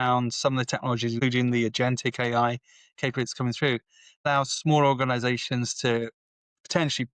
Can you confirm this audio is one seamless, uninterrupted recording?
no; 2 cuts; at 1.2 s, 4.3 s

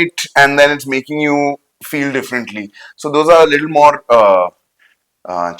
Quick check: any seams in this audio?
no; 0 cuts

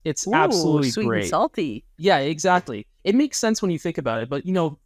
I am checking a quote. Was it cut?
yes; 1 cut; at 1.8 s

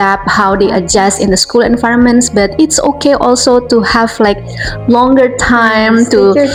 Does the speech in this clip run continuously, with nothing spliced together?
yes; 0 cuts

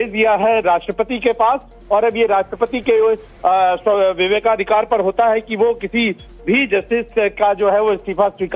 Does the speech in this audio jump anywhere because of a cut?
yes; 1 cut; at 5.1 s

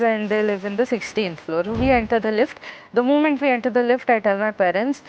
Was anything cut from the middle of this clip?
no; 0 cuts

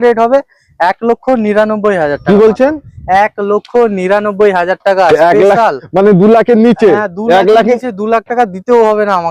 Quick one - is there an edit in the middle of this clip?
no; 0 cuts

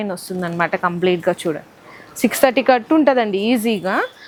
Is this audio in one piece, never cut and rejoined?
yes; 0 cuts

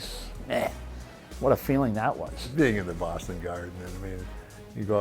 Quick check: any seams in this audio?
yes; 1 cut; at 2.3 s

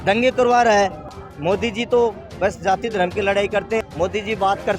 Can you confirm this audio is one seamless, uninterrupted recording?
no; 2 cuts; at 1.1 s, 3.8 s

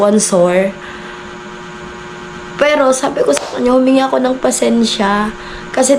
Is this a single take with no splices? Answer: yes; 0 cuts

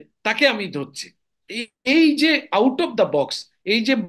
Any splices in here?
no; 0 cuts

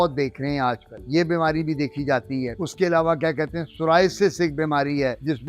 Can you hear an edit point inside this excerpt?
no; 0 cuts

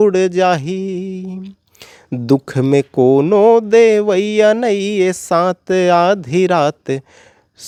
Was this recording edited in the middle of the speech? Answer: no; 0 cuts

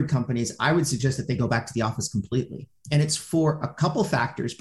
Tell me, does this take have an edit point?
no; 0 cuts

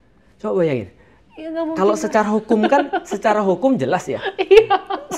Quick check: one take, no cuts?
yes; 0 cuts

